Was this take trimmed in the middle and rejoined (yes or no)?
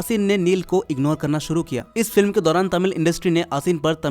yes